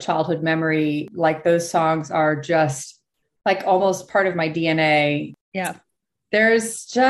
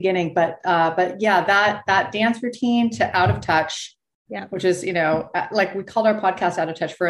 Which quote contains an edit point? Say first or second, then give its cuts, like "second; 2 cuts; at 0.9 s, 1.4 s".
first; 2 cuts; at 1.0 s, 5.3 s